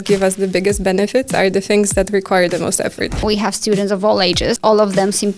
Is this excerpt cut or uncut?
cut